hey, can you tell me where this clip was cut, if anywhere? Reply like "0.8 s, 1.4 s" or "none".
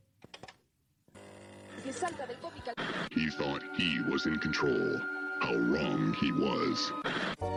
none